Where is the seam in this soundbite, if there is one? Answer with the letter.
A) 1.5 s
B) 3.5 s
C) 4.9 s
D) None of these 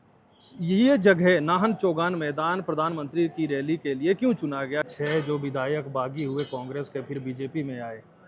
C